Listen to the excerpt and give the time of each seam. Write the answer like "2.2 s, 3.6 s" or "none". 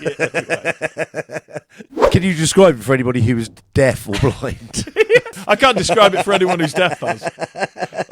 2.1 s, 5.4 s